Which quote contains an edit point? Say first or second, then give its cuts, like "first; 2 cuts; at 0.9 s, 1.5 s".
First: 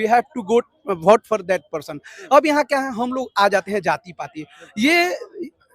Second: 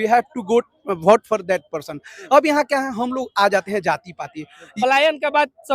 second; 1 cut; at 4.6 s